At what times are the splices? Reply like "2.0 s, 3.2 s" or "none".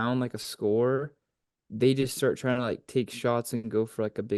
none

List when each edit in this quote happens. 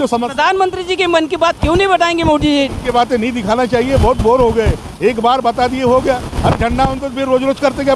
none

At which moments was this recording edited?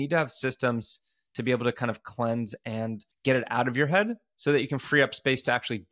3.1 s

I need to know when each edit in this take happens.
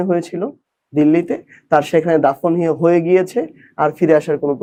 none

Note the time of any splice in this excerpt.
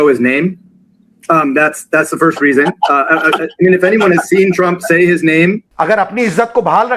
5.7 s

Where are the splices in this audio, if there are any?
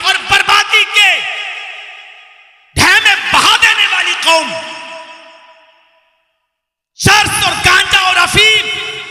none

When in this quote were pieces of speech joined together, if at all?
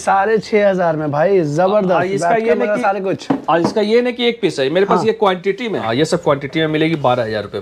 5.9 s

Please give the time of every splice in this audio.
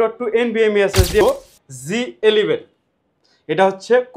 1.2 s

